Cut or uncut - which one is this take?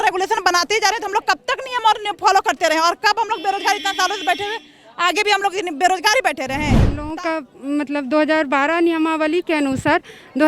cut